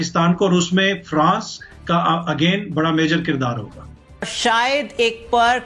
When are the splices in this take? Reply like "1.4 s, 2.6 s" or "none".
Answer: 4.2 s